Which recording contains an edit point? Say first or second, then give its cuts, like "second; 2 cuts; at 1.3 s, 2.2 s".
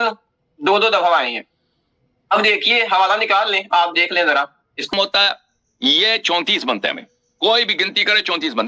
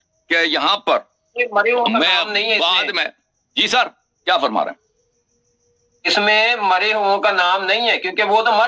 first; 1 cut; at 4.9 s